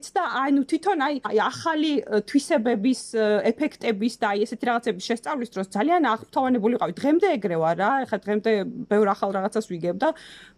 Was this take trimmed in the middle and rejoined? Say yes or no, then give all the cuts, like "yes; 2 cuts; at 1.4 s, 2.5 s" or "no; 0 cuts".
yes; 1 cut; at 1.3 s